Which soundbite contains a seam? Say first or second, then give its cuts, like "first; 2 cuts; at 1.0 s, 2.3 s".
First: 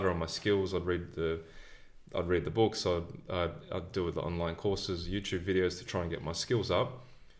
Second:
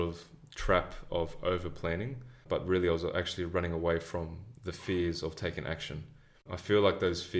second; 1 cut; at 2.4 s